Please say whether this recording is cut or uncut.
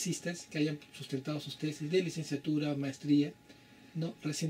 uncut